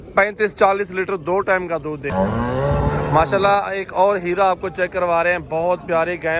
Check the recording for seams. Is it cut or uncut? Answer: cut